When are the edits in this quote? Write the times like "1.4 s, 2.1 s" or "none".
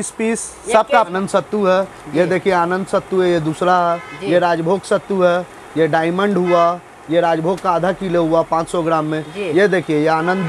1.1 s